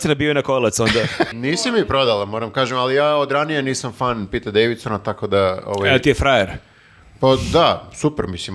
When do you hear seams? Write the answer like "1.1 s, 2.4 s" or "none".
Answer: 1.3 s